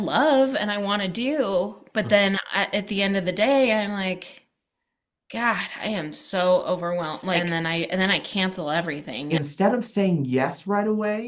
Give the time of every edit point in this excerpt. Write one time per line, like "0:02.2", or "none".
0:07.4
0:09.1